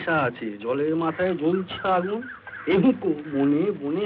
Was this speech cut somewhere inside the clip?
no; 0 cuts

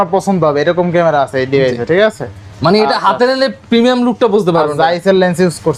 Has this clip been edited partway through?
no; 0 cuts

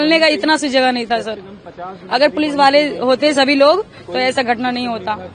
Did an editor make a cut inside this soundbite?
no; 0 cuts

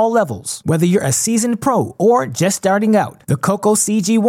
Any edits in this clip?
no; 0 cuts

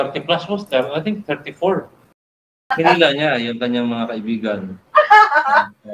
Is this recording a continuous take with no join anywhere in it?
no; 1 cut; at 2.6 s

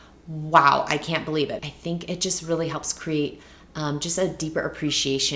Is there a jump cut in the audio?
yes; 1 cut; at 1.6 s

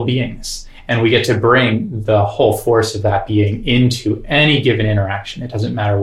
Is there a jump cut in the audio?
no; 0 cuts

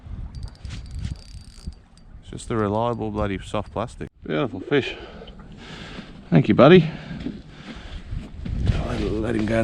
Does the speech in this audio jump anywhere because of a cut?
yes; 1 cut; at 4.2 s

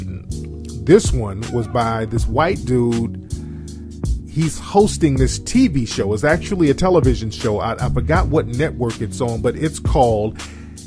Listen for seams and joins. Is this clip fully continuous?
no; 1 cut; at 1.1 s

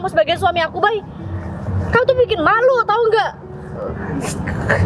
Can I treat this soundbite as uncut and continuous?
yes; 0 cuts

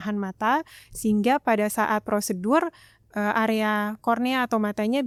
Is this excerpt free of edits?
yes; 0 cuts

